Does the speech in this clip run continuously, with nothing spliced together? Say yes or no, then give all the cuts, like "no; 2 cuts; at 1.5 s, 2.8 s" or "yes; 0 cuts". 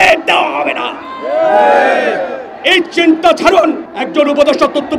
no; 1 cut; at 3.9 s